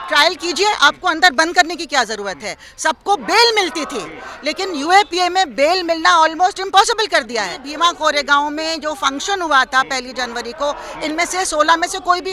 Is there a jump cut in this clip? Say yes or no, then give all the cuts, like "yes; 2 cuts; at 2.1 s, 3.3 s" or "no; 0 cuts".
yes; 1 cut; at 7.6 s